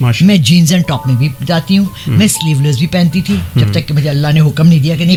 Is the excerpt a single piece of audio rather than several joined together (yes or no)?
yes